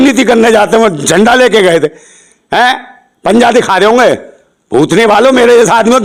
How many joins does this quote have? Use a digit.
0